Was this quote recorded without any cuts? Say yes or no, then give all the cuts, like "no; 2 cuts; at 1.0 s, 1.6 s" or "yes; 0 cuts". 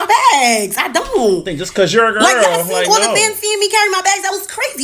yes; 0 cuts